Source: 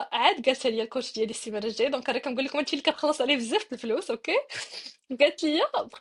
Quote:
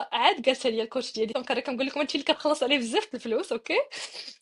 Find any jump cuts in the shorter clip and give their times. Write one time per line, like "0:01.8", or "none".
0:01.3